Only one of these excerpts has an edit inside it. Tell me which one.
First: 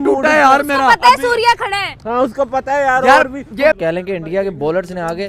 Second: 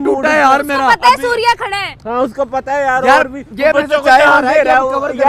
first; 1 cut; at 3.7 s

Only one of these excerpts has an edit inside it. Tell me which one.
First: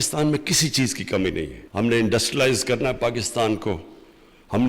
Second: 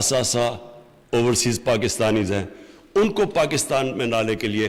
first; 1 cut; at 1.7 s

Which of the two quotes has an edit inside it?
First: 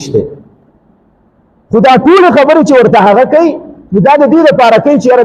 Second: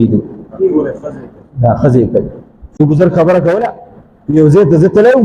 second; 1 cut; at 2.8 s

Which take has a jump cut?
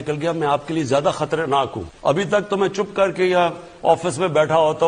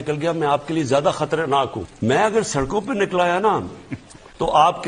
second; 1 cut; at 1.8 s

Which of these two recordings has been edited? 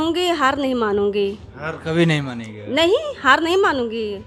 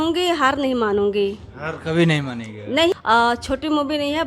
second; 1 cut; at 2.9 s

